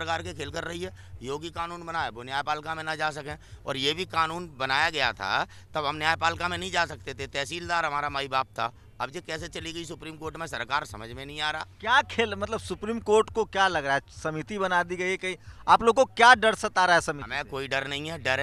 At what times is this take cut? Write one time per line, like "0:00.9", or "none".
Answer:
none